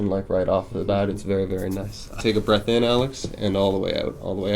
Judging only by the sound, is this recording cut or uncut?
cut